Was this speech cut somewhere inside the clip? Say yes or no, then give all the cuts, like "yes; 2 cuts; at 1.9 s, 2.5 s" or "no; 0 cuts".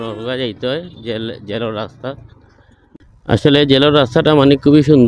yes; 1 cut; at 2.8 s